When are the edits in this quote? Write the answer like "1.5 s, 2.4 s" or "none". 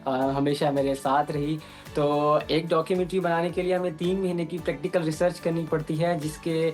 none